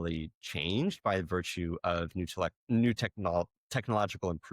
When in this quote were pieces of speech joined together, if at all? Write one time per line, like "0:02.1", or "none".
none